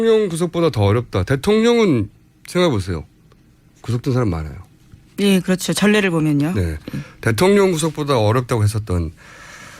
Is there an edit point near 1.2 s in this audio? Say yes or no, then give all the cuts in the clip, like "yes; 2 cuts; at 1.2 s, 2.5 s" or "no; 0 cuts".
yes; 1 cut; at 1.2 s